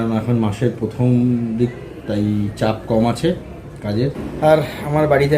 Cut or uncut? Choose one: cut